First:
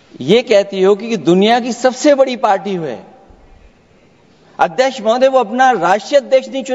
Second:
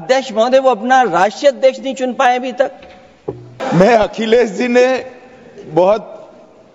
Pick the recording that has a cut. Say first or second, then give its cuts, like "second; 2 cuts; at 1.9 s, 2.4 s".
second; 1 cut; at 3.5 s